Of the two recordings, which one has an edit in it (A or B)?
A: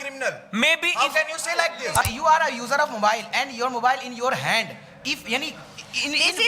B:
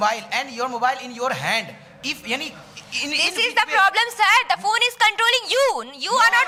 A